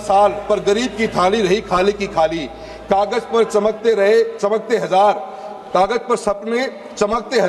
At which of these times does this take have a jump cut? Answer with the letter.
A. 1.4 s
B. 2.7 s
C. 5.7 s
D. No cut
D